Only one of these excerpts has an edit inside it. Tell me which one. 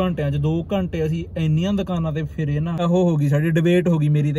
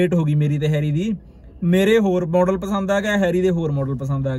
first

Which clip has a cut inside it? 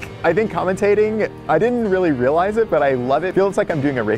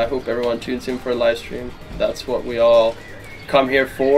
first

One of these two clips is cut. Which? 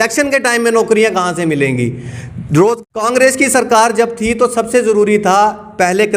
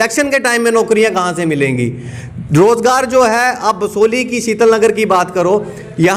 first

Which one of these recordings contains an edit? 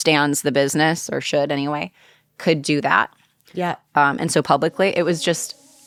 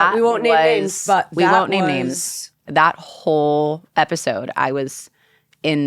second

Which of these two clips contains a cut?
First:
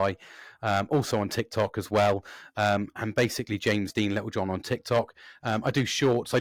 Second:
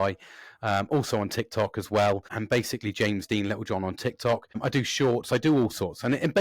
second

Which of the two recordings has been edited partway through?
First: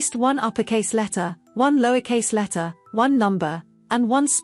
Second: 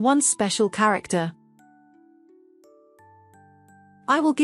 second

